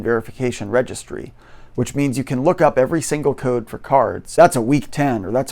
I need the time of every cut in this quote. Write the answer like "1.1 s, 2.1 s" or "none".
4.4 s